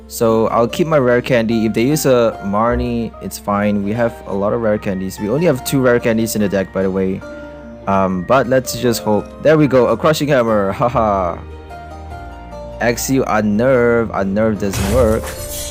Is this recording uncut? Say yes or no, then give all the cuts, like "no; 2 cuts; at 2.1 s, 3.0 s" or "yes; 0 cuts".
yes; 0 cuts